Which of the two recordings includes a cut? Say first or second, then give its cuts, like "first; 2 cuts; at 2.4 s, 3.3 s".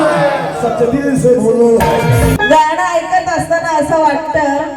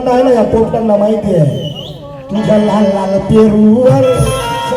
first; 1 cut; at 2.7 s